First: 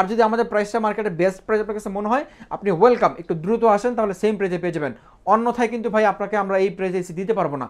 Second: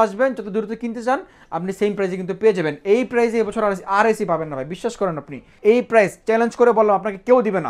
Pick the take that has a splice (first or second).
second